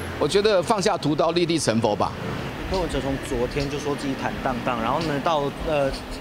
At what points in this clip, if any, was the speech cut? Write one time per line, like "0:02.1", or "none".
0:02.6